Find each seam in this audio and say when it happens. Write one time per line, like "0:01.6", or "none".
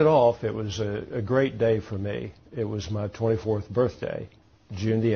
none